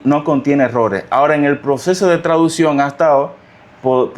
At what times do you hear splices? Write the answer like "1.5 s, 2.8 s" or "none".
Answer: none